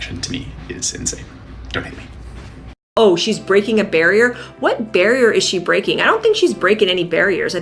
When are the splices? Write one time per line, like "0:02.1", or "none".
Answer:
0:02.9